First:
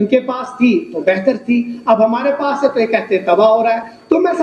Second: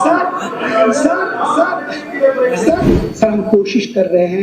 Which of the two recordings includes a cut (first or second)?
second